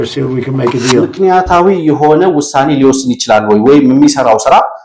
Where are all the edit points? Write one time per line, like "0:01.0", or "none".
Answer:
0:01.1